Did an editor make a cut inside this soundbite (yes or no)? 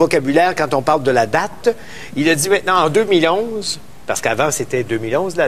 yes